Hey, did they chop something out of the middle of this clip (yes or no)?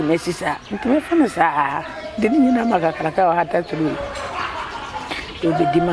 no